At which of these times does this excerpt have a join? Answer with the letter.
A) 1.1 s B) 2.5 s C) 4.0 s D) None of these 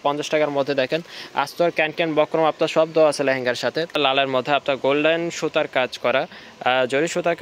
C